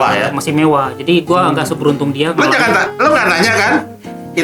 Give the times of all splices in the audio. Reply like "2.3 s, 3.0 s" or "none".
none